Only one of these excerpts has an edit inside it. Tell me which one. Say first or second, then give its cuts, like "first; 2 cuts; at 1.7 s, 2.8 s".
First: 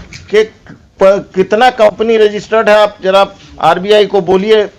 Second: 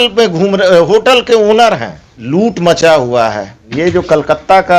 second; 2 cuts; at 2.1 s, 3.7 s